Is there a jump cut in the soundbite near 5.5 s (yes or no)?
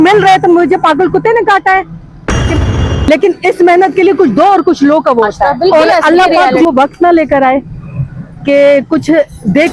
yes